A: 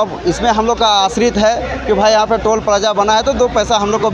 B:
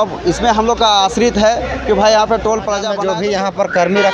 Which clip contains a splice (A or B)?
B